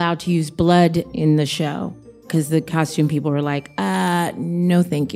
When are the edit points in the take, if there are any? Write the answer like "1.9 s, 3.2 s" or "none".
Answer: 1.1 s, 2.3 s